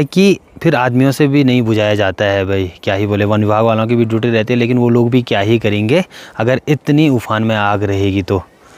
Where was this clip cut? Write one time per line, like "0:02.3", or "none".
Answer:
none